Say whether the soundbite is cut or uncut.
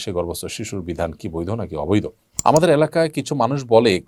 cut